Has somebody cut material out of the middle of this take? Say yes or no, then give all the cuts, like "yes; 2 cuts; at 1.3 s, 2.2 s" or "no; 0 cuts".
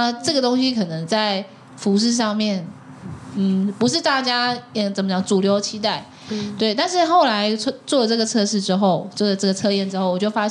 no; 0 cuts